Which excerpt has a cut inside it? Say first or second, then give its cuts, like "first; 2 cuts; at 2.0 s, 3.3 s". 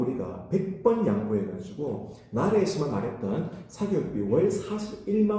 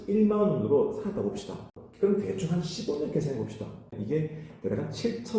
second; 2 cuts; at 1.7 s, 3.9 s